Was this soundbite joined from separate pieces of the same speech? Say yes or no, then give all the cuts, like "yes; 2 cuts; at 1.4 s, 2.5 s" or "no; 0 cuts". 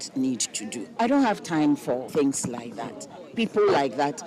yes; 2 cuts; at 1.0 s, 2.1 s